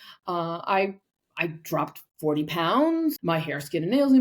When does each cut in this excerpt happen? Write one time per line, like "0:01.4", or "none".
0:03.2